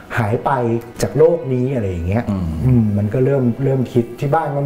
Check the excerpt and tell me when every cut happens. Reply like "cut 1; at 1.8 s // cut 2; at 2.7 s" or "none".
none